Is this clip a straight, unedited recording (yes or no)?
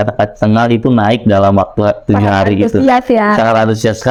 yes